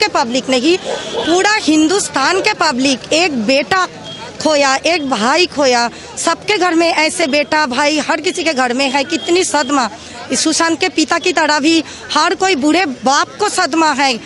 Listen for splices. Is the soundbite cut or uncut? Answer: uncut